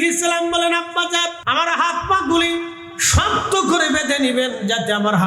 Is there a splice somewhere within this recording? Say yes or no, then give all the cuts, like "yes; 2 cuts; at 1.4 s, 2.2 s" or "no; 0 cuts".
yes; 1 cut; at 1.4 s